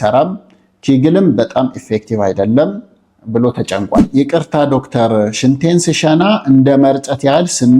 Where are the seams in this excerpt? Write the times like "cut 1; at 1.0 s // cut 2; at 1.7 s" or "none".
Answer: cut 1; at 4.1 s